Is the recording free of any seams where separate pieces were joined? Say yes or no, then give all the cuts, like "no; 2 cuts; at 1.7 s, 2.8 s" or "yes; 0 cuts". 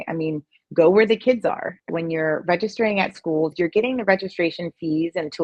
no; 2 cuts; at 1.8 s, 3.5 s